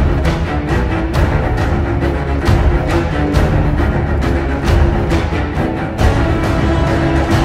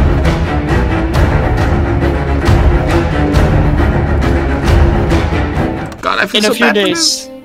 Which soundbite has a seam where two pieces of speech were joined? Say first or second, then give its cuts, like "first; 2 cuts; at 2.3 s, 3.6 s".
second; 1 cut; at 5.9 s